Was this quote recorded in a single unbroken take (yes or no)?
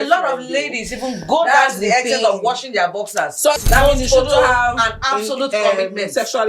no